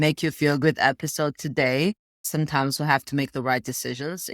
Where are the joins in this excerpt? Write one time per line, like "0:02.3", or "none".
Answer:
0:02.2